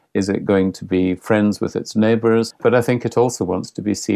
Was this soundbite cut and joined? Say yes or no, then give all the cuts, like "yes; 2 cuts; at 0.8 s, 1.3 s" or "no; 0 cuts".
yes; 1 cut; at 2.6 s